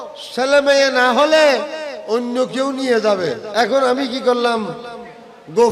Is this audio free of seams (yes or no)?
no